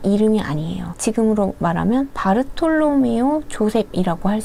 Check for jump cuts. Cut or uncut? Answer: uncut